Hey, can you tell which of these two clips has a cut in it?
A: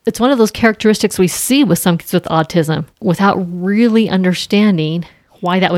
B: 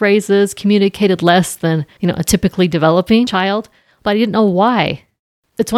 B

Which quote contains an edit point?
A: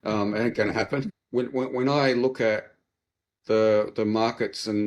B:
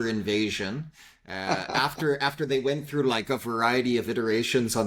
A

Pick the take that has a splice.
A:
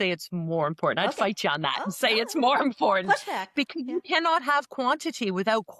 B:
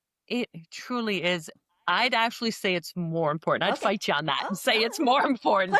B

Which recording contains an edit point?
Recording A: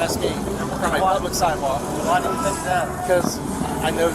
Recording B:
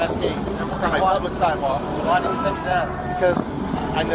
A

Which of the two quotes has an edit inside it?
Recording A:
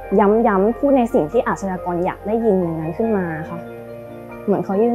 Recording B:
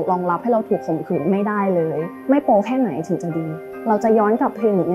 B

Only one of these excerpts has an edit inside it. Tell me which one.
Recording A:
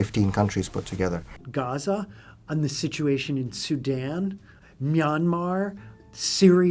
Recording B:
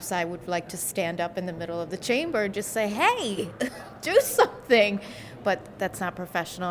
A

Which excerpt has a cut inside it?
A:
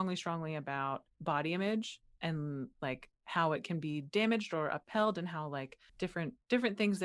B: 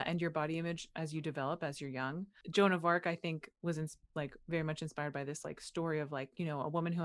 B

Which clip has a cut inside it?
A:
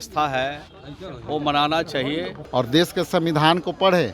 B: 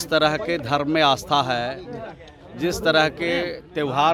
A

